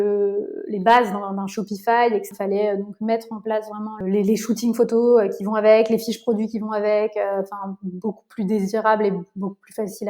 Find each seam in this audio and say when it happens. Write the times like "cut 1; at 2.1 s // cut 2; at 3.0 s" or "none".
cut 1; at 2.3 s // cut 2; at 4.0 s

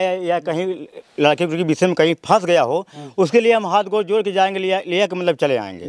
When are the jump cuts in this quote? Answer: none

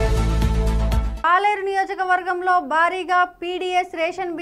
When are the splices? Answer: cut 1; at 1.1 s

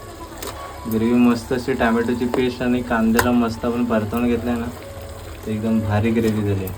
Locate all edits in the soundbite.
none

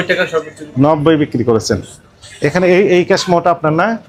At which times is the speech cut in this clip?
none

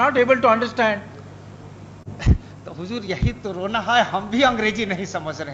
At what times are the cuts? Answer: none

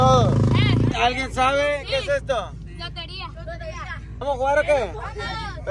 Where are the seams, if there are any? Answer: cut 1; at 0.9 s // cut 2; at 4.2 s

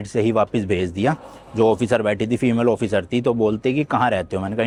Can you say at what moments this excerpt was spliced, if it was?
none

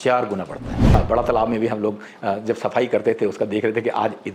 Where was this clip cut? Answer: cut 1; at 0.9 s

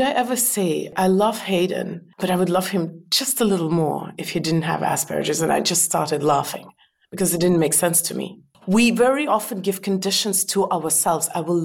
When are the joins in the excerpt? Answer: cut 1; at 0.9 s // cut 2; at 2.0 s // cut 3; at 8.5 s

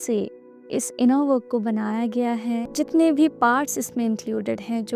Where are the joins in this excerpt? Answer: cut 1; at 2.7 s

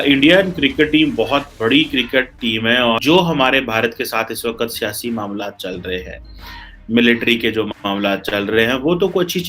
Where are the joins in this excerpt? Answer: cut 1; at 3.0 s

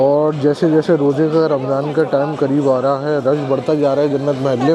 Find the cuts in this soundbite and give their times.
none

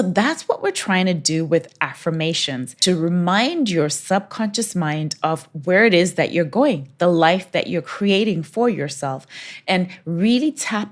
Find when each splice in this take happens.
cut 1; at 2.8 s

